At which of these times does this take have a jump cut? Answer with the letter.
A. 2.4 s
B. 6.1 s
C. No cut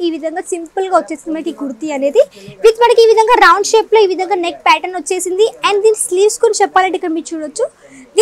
C